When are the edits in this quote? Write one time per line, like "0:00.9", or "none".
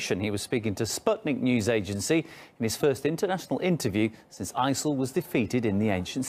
0:02.7

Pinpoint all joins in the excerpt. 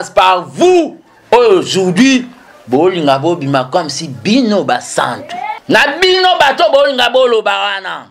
0:05.5

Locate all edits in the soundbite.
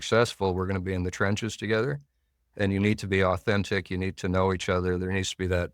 none

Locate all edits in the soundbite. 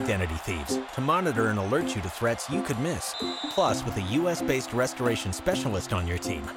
none

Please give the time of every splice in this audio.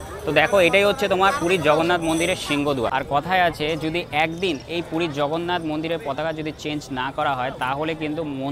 0:02.9

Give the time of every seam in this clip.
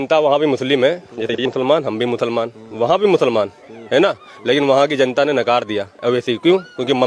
0:01.4

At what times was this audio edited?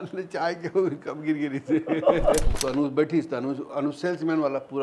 0:02.5

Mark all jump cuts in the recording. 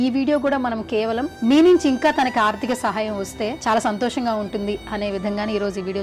0:01.3
0:03.6

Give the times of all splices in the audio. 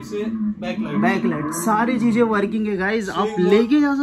none

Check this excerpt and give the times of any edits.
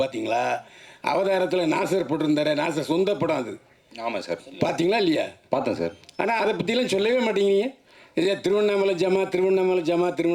none

